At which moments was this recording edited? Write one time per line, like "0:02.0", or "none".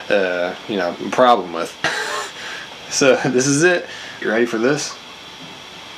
0:01.8
0:04.2